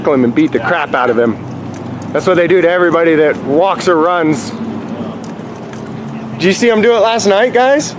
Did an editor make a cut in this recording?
no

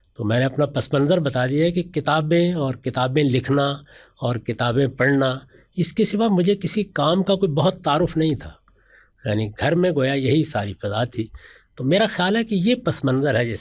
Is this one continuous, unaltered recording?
yes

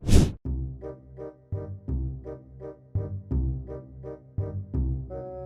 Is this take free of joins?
yes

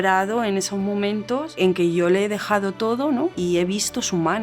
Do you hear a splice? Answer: yes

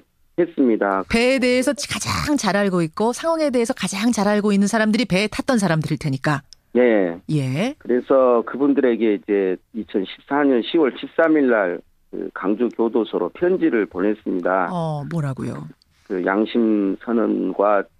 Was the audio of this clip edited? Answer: yes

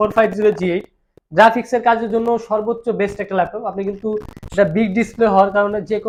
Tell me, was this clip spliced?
no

